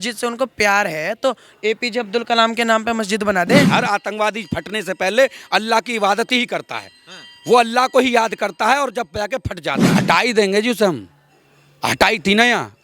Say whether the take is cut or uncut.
cut